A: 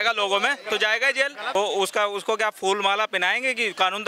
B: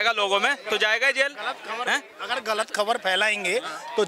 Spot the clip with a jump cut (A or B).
A